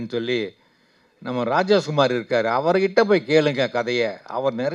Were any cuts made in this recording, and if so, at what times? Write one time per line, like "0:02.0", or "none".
none